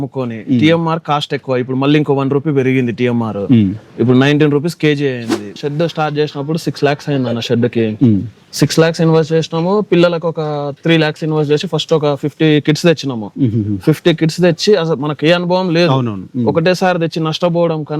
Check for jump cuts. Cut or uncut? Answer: cut